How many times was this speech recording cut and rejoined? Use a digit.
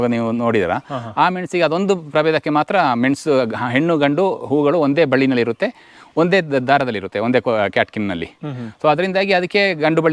0